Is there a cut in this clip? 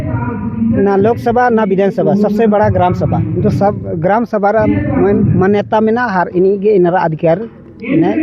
no; 0 cuts

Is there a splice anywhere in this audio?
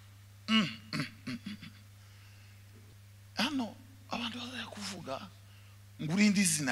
yes; 1 cut; at 2.9 s

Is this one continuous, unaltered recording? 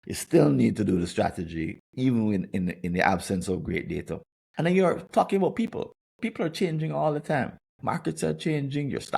yes; 0 cuts

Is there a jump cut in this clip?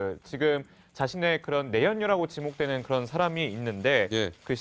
no; 0 cuts

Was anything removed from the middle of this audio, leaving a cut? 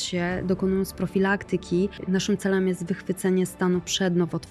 yes; 1 cut; at 2.0 s

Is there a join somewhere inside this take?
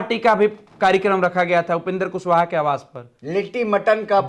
no; 0 cuts

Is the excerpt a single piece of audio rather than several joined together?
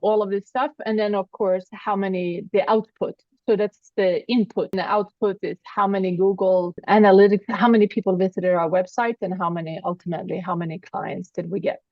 no; 2 cuts; at 4.7 s, 6.8 s

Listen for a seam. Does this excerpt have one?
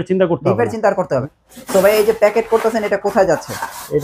yes; 1 cut; at 1.2 s

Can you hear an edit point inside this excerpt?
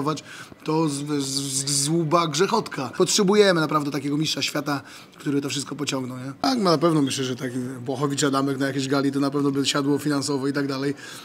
yes; 2 cuts; at 2.9 s, 6.4 s

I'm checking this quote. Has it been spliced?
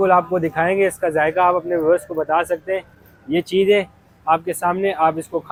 no; 0 cuts

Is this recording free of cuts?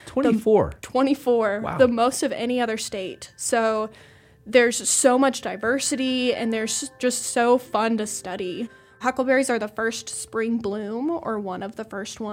no; 2 cuts; at 7.0 s, 8.8 s

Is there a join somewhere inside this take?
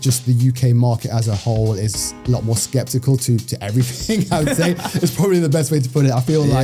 no; 0 cuts

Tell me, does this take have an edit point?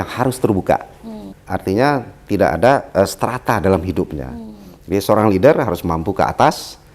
yes; 1 cut; at 1.3 s

